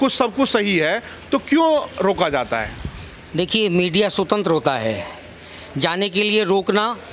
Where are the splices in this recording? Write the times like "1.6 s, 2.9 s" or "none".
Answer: none